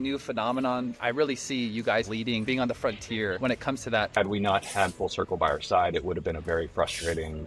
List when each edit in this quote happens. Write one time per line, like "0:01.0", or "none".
0:02.3
0:04.1